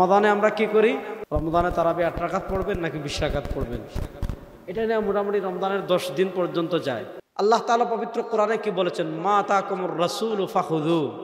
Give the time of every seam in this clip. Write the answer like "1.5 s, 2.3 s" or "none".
1.1 s, 7.2 s